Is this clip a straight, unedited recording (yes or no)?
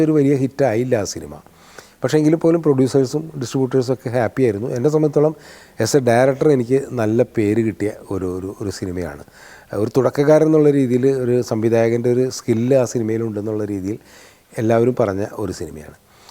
yes